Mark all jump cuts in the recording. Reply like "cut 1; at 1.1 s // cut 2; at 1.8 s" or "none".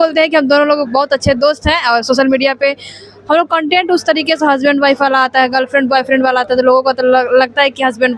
none